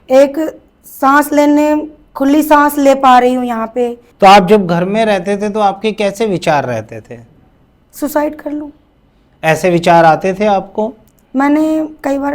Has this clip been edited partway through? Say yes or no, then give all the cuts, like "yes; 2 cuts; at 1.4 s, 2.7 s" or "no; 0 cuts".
yes; 1 cut; at 4.0 s